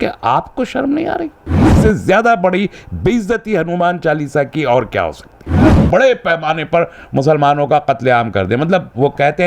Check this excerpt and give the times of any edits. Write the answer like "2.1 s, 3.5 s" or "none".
1.7 s, 5.8 s